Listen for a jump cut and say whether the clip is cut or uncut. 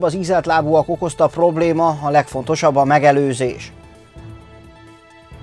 cut